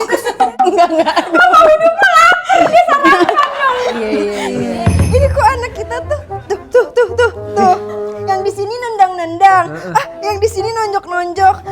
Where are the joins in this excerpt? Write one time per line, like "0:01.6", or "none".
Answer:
0:05.0